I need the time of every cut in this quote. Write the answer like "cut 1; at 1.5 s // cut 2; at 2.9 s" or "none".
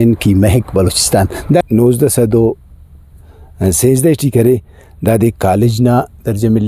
cut 1; at 1.6 s